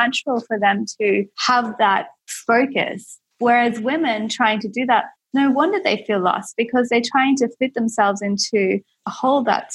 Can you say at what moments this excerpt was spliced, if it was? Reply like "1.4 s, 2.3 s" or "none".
1.8 s